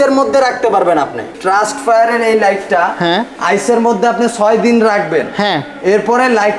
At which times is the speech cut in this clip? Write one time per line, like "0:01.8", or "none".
0:01.3